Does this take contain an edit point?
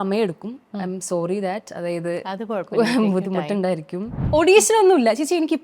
yes; 1 cut; at 4.2 s

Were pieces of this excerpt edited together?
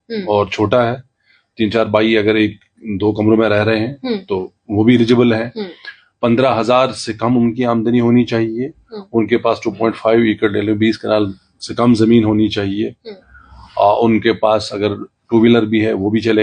no; 0 cuts

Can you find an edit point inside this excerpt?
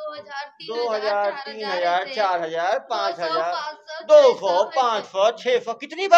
no; 0 cuts

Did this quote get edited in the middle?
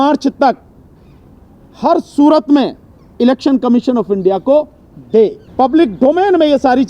yes; 1 cut; at 5.4 s

